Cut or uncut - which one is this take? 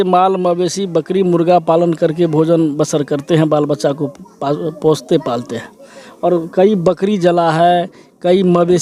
uncut